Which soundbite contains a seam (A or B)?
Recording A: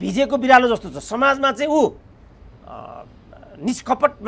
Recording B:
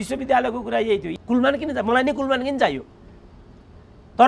B